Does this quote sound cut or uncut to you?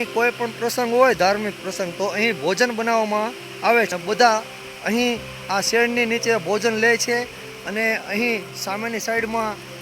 cut